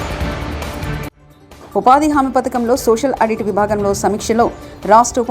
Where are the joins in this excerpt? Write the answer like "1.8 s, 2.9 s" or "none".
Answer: 1.2 s